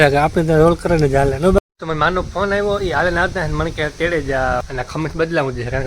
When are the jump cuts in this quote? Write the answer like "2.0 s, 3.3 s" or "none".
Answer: 1.6 s, 4.7 s